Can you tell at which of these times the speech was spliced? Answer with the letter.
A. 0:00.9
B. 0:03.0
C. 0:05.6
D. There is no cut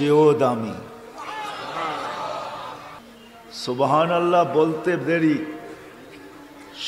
B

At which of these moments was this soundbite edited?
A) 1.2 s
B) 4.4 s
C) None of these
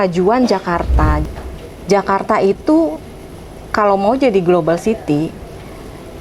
A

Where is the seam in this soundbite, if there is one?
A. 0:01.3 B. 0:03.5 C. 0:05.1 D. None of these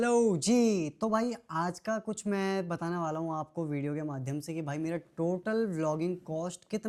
D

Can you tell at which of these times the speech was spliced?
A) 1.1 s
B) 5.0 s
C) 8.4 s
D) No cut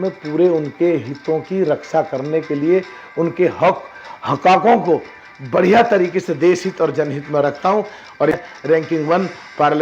C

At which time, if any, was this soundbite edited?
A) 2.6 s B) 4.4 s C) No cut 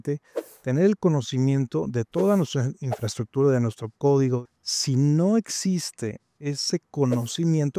B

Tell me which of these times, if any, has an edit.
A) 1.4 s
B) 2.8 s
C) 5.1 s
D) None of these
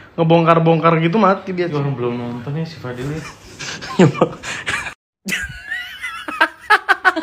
C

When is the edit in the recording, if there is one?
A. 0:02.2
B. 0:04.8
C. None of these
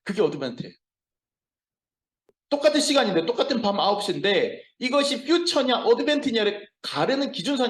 A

